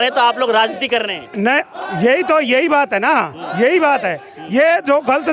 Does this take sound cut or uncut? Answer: uncut